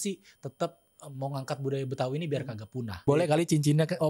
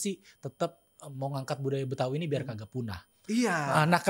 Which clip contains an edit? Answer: first; 1 cut; at 3.0 s

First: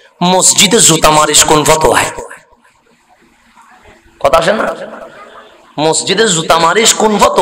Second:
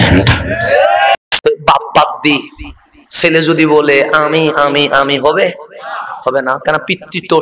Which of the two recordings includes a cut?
second; 1 cut; at 1.2 s

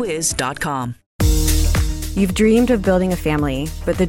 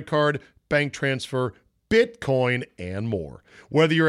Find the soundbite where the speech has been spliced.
first; 1 cut; at 1.0 s

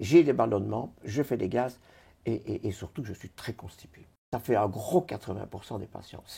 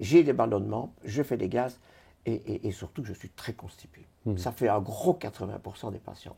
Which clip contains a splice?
first; 1 cut; at 4.2 s

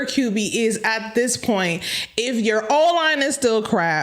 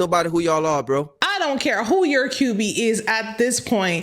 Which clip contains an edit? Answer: second; 1 cut; at 1.2 s

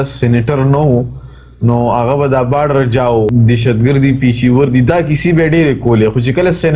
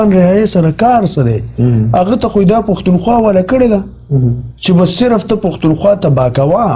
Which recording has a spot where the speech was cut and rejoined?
first; 2 cuts; at 3.3 s, 4.9 s

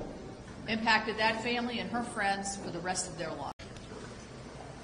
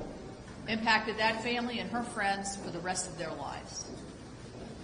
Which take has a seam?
second; 1 cut; at 3.5 s

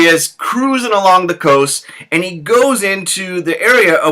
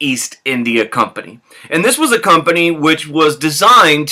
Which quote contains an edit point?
first; 1 cut; at 1.0 s

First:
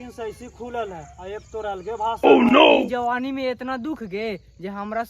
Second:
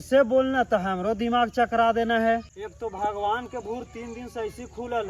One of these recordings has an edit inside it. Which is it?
first; 2 cuts; at 2.2 s, 2.9 s

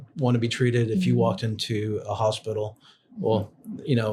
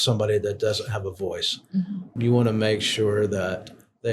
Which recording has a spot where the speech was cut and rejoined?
second; 1 cut; at 2.1 s

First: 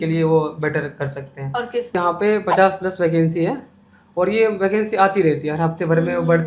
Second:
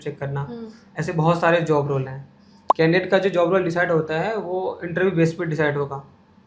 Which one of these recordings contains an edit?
first; 1 cut; at 2.0 s

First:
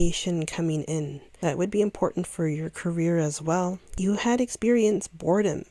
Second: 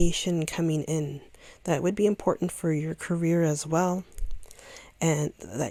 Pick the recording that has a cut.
first; 2 cuts; at 1.2 s, 3.9 s

